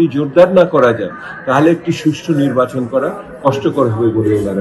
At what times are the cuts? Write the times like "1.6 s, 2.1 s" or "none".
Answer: none

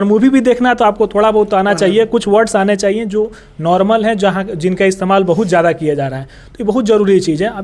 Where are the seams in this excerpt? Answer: none

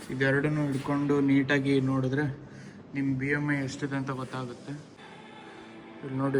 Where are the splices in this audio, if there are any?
5.0 s

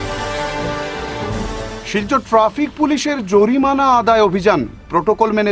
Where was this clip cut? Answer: 1.0 s

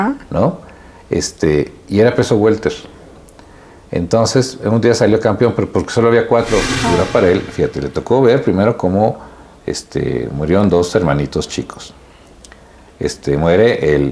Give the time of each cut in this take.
6.7 s

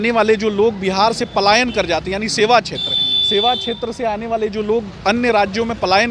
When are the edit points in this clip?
none

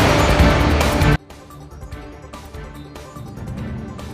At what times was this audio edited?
0.9 s

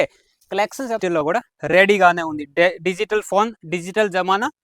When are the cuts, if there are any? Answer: 1.0 s

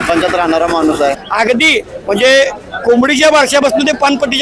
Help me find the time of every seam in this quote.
1.2 s, 2.7 s

